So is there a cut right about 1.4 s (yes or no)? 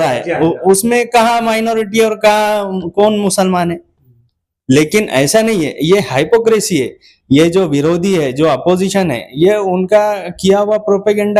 no